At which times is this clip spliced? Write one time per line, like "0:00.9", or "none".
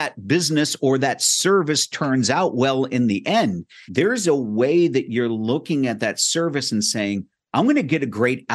0:03.7

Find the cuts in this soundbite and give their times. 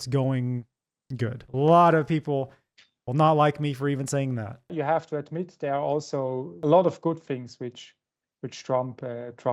0:01.4
0:04.7
0:06.5

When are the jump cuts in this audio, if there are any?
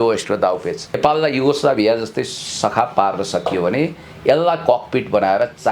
0:01.0

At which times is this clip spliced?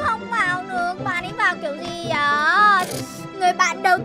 0:02.9

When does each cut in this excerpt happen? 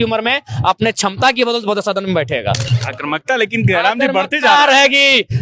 0:02.7

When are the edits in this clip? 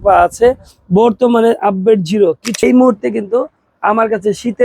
0:02.6

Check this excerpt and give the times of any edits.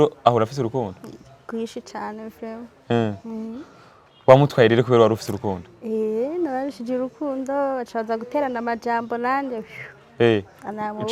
none

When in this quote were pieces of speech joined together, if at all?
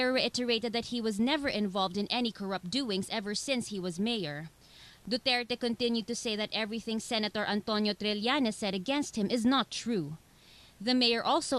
0:06.7

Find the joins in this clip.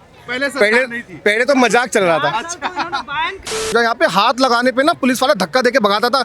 0:03.7

